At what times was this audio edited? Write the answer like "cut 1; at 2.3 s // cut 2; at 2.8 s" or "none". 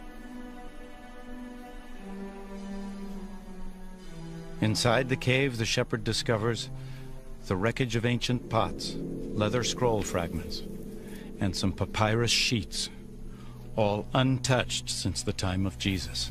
none